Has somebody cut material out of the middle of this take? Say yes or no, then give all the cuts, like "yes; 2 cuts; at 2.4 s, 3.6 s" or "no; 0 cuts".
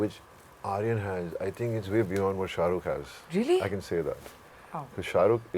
no; 0 cuts